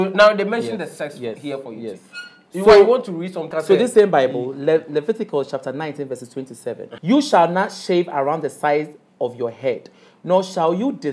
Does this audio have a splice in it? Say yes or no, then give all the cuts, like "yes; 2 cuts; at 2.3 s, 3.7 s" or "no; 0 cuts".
yes; 2 cuts; at 3.4 s, 6.9 s